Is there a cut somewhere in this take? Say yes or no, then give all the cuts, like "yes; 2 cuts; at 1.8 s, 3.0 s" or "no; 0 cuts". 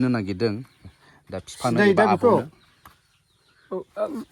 no; 0 cuts